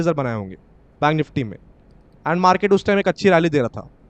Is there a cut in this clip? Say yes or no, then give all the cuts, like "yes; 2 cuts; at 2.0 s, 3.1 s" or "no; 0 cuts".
no; 0 cuts